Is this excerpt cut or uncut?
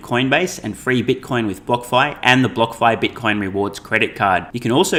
uncut